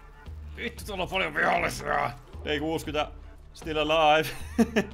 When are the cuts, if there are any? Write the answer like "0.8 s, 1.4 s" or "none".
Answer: 2.3 s